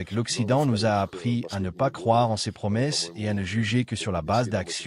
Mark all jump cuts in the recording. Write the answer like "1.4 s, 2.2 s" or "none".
none